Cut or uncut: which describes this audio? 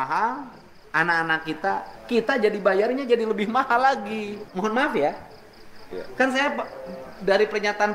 cut